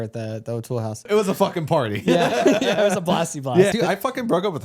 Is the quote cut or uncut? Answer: cut